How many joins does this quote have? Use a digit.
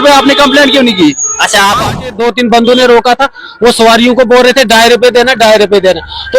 1